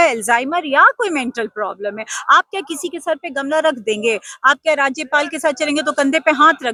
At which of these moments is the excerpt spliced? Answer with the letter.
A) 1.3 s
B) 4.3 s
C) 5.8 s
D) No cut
D